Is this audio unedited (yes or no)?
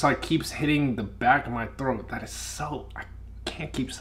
yes